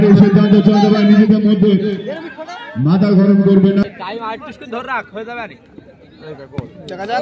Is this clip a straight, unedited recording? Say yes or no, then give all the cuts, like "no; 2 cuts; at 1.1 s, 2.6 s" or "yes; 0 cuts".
no; 1 cut; at 3.8 s